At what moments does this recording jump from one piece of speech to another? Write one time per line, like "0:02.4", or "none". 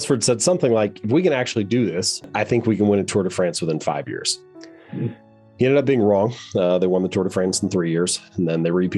0:02.3